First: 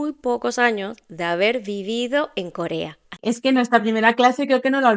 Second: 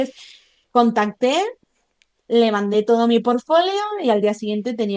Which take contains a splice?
first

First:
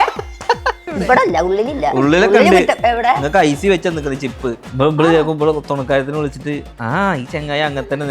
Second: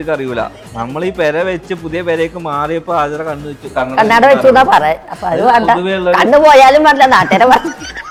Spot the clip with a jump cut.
first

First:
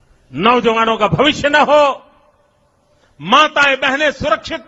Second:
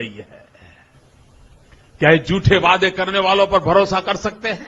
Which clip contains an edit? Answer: second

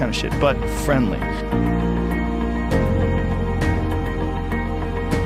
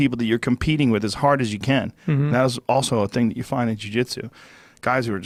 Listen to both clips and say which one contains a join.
first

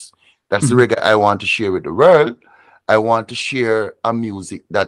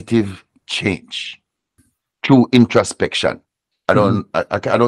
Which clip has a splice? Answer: second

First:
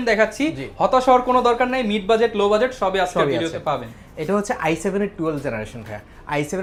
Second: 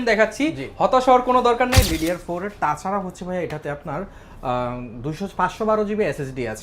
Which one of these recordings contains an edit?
second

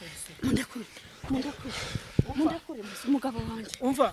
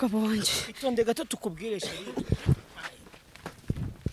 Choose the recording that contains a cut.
second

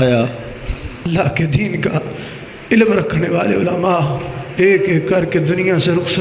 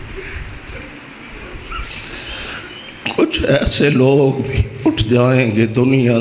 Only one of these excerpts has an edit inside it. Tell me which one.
first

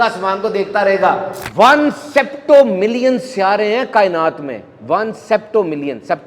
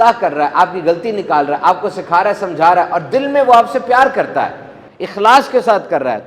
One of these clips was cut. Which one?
first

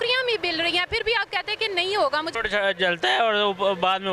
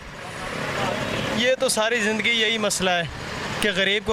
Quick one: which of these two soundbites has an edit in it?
first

